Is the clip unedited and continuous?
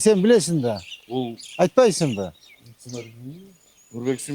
yes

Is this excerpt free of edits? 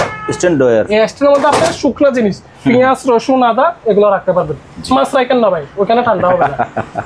yes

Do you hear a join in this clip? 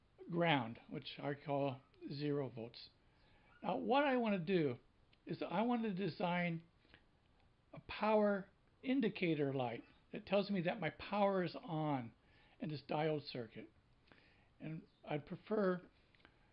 no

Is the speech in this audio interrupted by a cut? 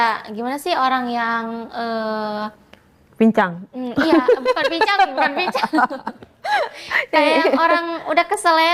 no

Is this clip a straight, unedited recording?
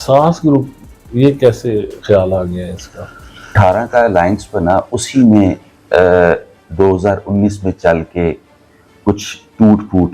no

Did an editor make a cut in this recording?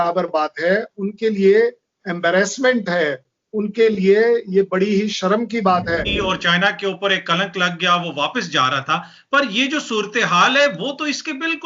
yes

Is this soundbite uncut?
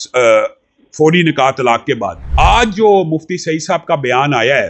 no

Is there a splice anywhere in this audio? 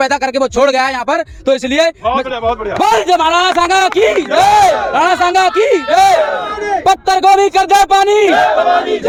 no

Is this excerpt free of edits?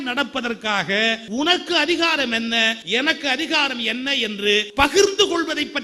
no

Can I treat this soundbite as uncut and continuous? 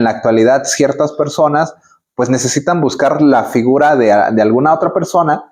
yes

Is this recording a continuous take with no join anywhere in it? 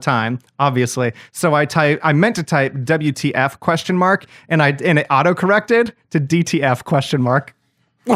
yes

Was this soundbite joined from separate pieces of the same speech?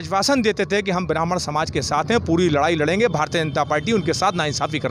no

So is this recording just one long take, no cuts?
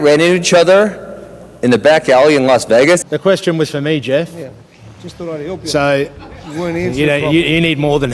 no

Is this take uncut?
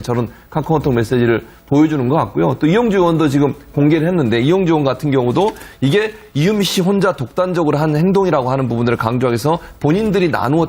no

